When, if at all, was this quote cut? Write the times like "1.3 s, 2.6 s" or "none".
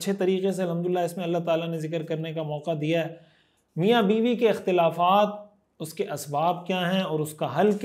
none

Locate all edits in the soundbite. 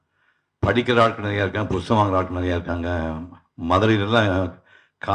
none

